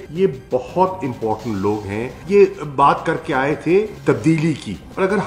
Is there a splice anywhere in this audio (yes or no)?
yes